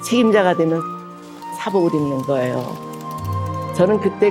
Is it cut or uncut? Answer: uncut